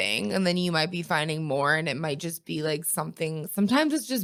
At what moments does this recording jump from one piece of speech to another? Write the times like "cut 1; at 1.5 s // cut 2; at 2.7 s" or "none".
none